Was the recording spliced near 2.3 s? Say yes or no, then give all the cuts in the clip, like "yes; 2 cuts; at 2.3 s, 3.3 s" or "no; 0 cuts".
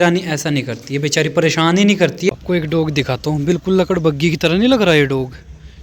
yes; 1 cut; at 2.3 s